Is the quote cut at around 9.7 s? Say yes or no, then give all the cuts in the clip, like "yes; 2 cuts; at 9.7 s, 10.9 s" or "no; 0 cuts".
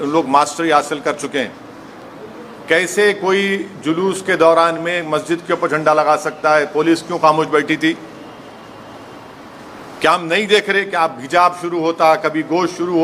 yes; 1 cut; at 9.7 s